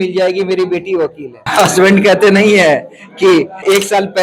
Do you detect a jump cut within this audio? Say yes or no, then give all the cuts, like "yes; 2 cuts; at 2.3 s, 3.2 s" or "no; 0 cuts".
yes; 1 cut; at 1.5 s